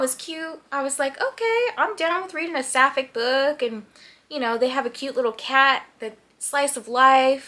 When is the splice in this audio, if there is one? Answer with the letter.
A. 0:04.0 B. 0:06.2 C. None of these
C